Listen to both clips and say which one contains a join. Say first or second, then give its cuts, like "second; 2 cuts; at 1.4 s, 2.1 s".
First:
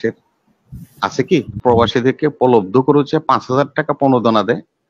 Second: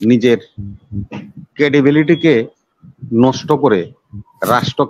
first; 1 cut; at 1.6 s